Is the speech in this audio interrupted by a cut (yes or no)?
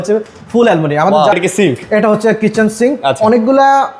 yes